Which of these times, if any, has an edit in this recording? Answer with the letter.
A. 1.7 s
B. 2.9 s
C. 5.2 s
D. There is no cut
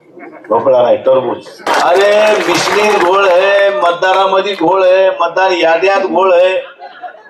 A